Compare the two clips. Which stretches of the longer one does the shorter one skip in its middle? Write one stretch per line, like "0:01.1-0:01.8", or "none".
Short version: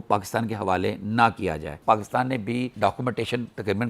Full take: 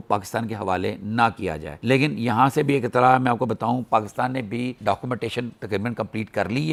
0:01.8-0:03.8